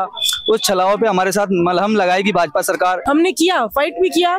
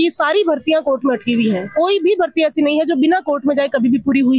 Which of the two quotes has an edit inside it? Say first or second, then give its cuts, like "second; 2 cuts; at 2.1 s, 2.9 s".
first; 1 cut; at 3.0 s